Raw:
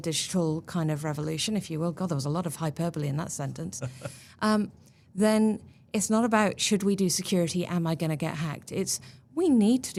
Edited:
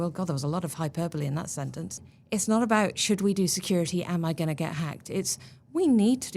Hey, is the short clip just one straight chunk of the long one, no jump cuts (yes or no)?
no